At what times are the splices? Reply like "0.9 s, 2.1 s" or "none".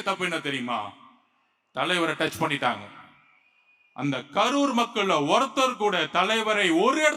none